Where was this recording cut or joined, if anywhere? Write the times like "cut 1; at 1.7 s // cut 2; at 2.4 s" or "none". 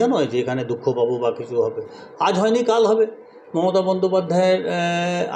none